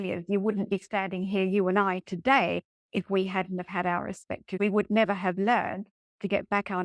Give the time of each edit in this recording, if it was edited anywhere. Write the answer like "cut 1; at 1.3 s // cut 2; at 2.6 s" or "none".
cut 1; at 4.6 s